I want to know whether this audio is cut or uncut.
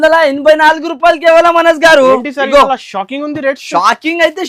uncut